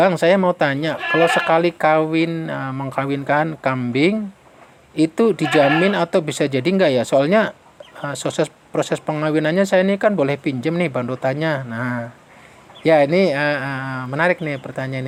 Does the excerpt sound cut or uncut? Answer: uncut